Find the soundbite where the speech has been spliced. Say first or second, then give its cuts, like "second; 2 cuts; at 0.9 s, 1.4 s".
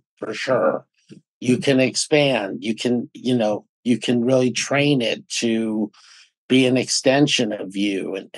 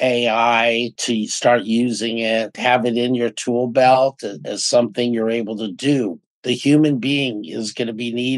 second; 2 cuts; at 1.0 s, 2.5 s